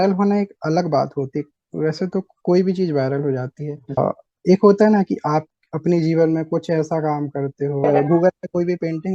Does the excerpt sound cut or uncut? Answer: cut